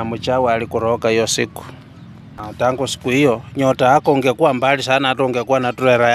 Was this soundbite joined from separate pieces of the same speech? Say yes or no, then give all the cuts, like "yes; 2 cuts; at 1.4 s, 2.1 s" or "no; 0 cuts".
yes; 1 cut; at 2.4 s